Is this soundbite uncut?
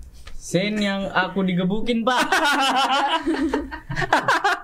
yes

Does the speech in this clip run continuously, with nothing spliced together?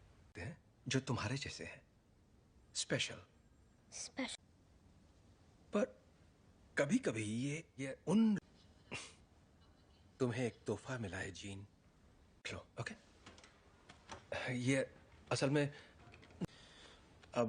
yes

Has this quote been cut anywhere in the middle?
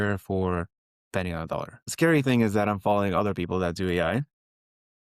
yes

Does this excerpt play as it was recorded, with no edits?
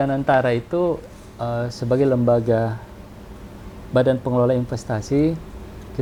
yes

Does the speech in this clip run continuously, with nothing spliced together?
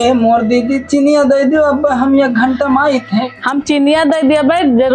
yes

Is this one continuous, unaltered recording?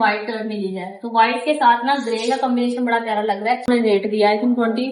no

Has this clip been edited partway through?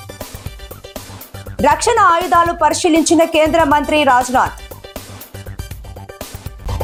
no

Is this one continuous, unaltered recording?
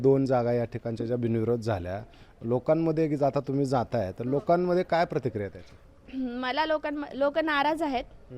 yes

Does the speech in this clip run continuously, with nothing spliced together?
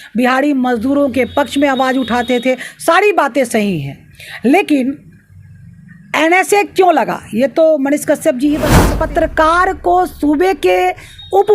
no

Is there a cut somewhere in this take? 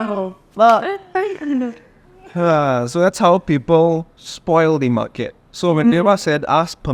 no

